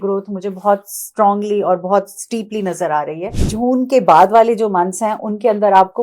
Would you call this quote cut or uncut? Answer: cut